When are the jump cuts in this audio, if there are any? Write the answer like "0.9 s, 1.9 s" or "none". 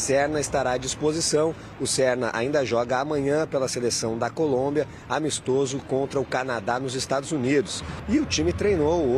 none